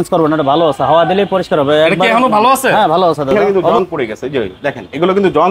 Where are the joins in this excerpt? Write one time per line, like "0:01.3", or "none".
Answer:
0:03.3